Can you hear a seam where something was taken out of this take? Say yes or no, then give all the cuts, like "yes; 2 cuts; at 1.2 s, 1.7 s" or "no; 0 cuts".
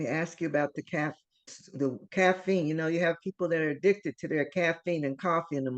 yes; 1 cut; at 1.5 s